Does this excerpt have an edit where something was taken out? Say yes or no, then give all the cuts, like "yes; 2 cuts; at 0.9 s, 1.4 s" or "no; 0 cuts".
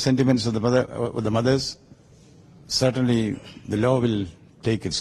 no; 0 cuts